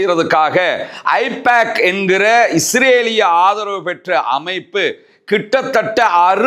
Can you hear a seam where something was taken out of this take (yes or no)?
no